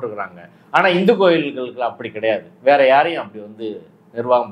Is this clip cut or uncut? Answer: uncut